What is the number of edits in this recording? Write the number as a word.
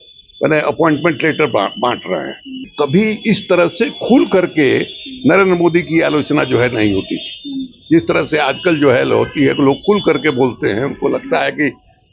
one